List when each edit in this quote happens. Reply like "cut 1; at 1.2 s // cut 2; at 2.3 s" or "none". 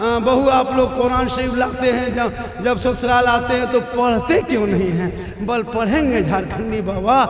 none